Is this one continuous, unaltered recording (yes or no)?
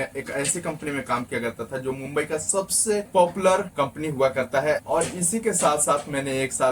no